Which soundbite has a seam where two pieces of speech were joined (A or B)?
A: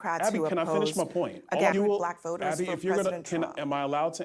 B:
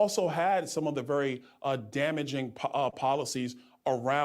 A